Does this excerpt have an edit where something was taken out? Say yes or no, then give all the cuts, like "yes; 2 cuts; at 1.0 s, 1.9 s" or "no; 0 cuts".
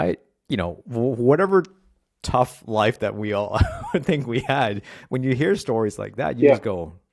no; 0 cuts